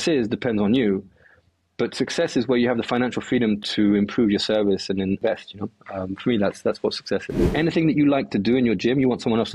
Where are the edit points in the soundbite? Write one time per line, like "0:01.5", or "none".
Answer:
0:03.6
0:05.2
0:07.4